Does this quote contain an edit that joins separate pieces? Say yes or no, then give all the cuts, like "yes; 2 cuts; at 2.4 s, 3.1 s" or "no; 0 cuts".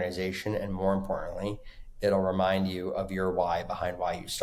no; 0 cuts